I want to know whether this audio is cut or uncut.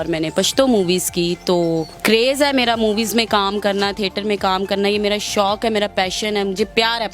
cut